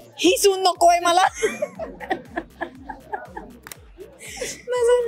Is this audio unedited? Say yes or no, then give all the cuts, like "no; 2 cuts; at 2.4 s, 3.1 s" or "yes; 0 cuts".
yes; 0 cuts